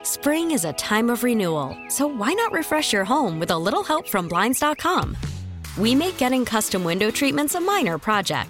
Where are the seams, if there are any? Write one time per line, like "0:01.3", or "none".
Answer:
none

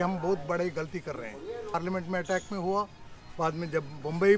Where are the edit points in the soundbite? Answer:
0:01.8

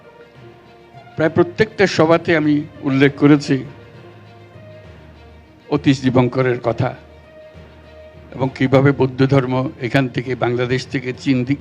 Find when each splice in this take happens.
0:01.1

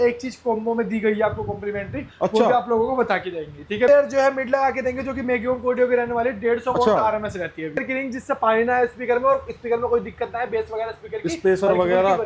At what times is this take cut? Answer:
0:03.9
0:07.8

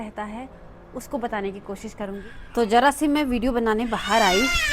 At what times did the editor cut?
0:02.2

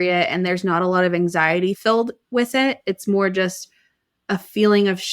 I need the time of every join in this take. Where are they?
0:01.8

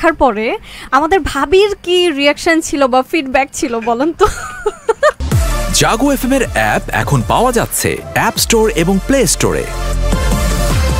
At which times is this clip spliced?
0:05.2

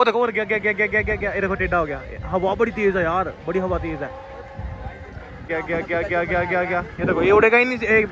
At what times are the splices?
0:05.5

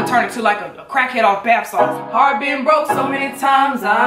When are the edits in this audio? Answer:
0:02.0

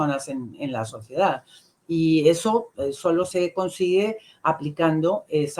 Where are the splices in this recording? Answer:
none

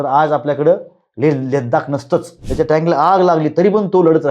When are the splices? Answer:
0:02.4

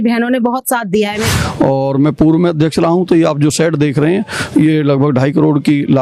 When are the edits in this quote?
0:01.3

